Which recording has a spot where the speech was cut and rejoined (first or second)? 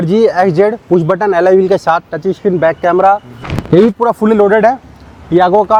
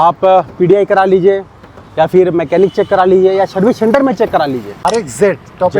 second